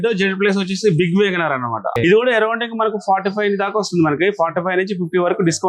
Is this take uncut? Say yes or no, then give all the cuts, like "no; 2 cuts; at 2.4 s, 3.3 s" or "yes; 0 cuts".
no; 1 cut; at 1.9 s